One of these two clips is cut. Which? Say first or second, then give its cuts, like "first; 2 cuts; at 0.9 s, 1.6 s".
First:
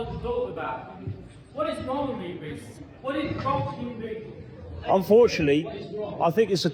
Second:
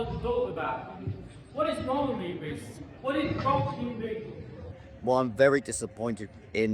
second; 1 cut; at 4.8 s